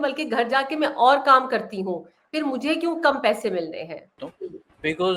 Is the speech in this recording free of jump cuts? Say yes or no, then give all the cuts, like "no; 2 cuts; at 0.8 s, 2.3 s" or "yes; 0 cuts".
no; 1 cut; at 4.2 s